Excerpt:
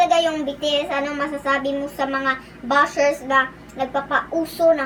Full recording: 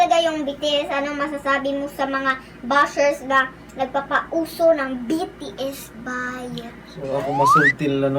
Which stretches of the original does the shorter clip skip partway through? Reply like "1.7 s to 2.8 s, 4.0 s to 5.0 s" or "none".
none

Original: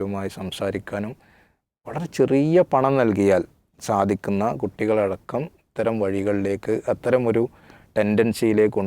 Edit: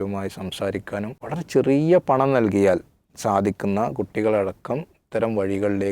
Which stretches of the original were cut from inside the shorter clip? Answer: 1.2 s to 1.8 s

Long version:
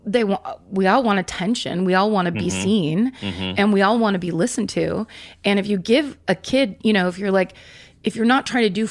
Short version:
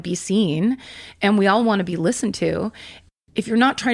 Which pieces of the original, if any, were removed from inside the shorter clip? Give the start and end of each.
5.3 s to 7.6 s

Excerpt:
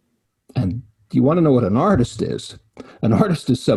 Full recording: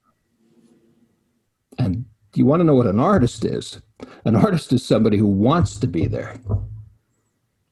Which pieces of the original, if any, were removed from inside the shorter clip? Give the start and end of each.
none

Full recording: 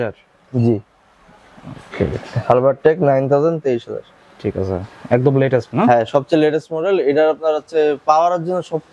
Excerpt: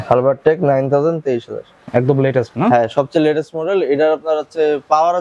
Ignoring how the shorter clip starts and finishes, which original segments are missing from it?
4.1 s to 4.9 s

